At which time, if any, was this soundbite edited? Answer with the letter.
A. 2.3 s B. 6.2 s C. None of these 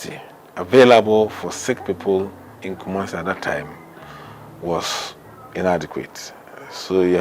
C